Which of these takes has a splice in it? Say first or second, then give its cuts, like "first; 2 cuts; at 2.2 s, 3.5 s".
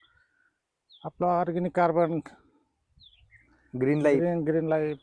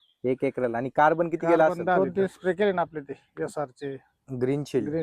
second; 1 cut; at 2.0 s